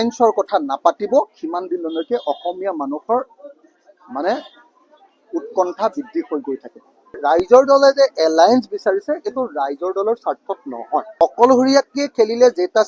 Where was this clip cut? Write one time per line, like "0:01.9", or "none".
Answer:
0:07.2
0:11.1